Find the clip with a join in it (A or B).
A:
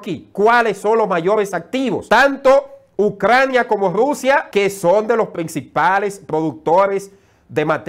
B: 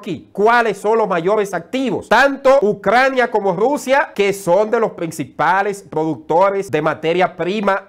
B